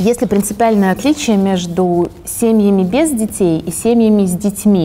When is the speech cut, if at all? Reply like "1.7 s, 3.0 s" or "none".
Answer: none